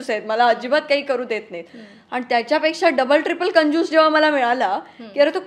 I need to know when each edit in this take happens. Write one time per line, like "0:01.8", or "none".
none